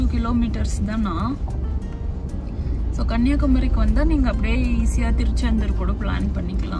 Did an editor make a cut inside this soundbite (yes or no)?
no